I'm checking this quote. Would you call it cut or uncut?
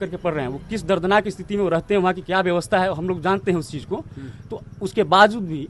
uncut